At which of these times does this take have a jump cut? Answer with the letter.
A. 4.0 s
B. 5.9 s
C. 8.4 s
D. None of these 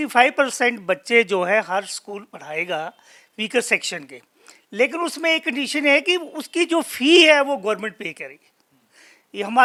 D